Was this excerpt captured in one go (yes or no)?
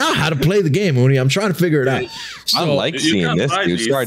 yes